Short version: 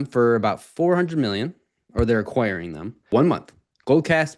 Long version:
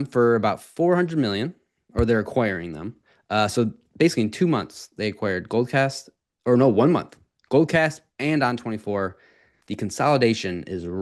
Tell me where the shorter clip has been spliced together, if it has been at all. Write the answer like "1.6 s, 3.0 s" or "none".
3.1 s